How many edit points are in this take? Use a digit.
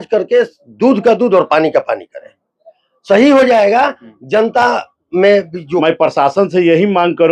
1